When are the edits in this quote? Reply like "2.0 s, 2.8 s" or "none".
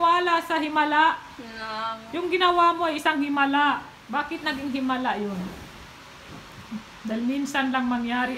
2.0 s, 3.9 s